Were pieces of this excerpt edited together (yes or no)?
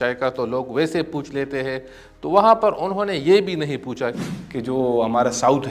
yes